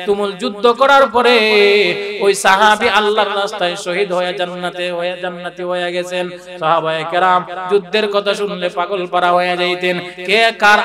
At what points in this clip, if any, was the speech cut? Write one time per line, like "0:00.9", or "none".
none